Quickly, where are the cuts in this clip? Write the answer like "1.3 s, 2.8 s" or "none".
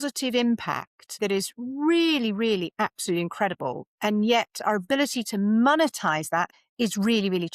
1.2 s, 6.6 s